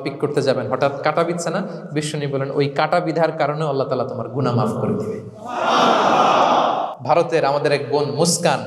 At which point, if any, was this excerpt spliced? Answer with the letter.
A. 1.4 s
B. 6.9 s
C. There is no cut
B